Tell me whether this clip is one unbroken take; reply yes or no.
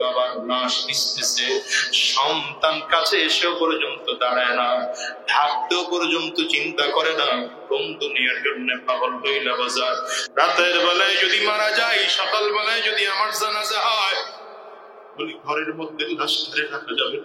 no